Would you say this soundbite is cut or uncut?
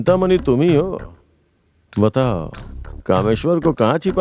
uncut